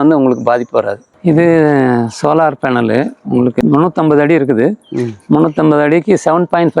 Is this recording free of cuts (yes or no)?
no